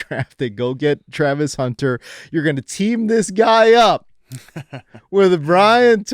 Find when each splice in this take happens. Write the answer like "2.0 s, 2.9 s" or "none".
none